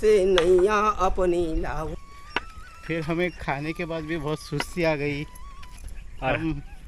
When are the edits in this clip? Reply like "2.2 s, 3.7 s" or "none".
1.9 s